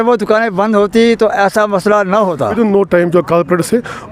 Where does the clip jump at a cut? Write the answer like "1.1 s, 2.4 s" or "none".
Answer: 2.5 s

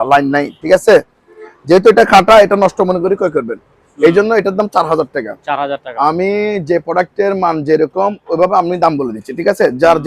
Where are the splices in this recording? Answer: none

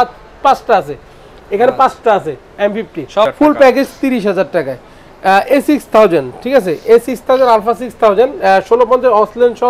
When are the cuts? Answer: 3.3 s

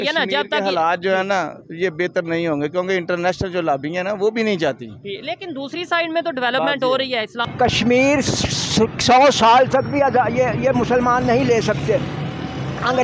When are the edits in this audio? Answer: 7.5 s

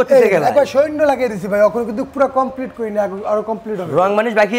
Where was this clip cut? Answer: none

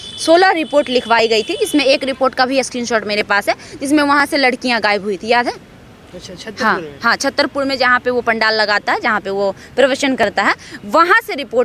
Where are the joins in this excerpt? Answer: none

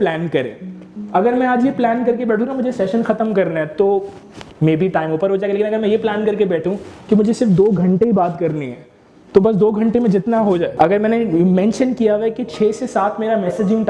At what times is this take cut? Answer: 10.7 s

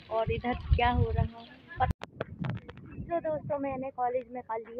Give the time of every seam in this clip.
1.9 s

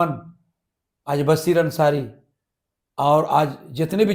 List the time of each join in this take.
none

